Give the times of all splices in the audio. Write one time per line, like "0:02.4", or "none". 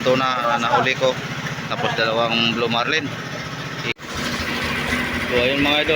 0:03.9

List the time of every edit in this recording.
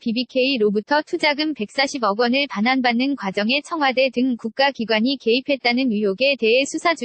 none

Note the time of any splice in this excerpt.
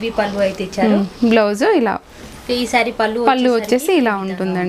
0:02.1

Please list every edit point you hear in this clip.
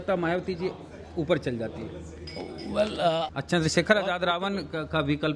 0:03.3

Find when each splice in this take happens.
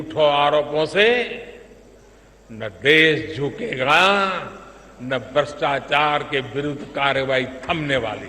none

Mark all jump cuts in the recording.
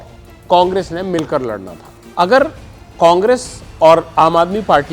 0:02.1

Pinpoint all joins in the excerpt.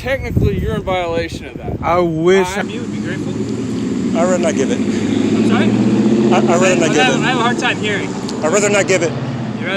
0:02.6

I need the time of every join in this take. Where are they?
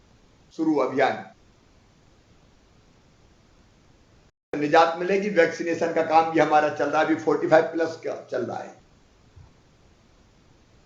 0:04.3

